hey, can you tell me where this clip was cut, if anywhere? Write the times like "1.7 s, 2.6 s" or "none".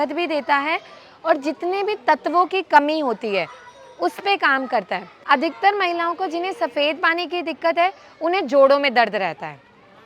5.1 s